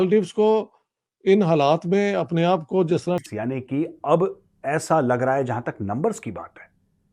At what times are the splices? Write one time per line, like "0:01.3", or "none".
0:03.2